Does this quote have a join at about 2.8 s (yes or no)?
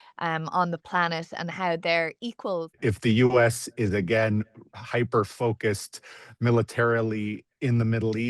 yes